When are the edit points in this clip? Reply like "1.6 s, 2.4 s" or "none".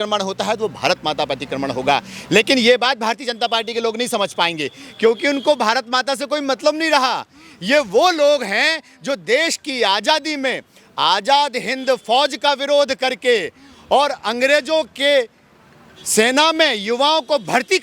none